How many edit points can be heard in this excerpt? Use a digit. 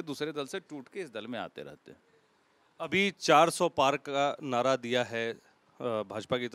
0